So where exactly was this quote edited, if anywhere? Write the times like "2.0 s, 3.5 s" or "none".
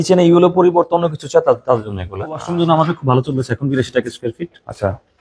2.4 s